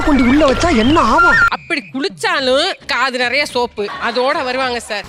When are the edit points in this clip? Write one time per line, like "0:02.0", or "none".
0:03.9

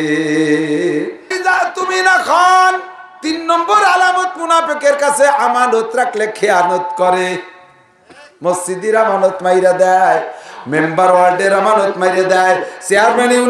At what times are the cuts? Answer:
0:01.4

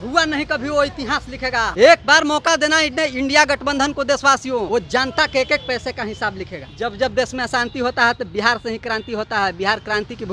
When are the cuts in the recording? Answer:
0:01.7
0:04.7
0:06.6

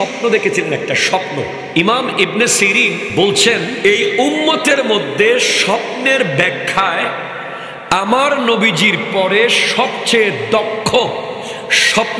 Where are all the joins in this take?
0:01.6
0:03.1
0:03.7

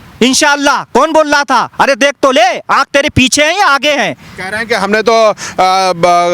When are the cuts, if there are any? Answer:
none

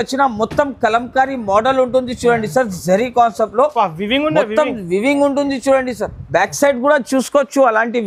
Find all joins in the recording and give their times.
none

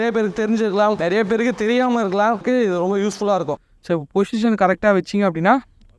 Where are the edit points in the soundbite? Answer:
0:01.0
0:02.4
0:03.6

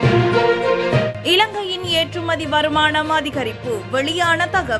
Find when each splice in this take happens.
none

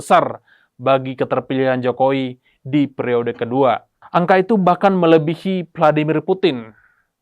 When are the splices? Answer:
0:03.9

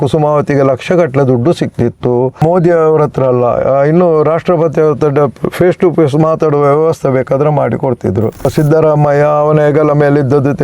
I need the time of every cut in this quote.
0:02.4
0:08.5

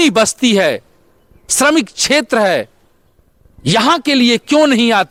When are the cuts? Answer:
none

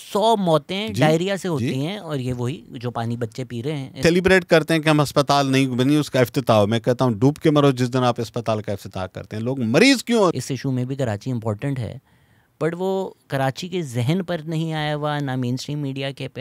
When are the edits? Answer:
0:04.0
0:10.4

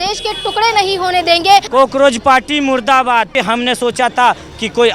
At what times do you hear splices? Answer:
0:01.7
0:03.3

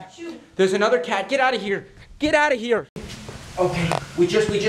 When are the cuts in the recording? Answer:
0:03.1

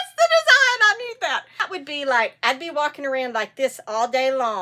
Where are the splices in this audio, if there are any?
0:01.7

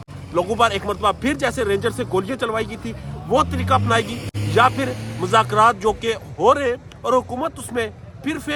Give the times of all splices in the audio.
none

